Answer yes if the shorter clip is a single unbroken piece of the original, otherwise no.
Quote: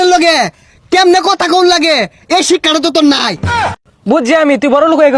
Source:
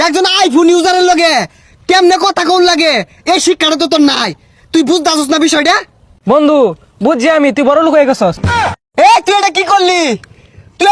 no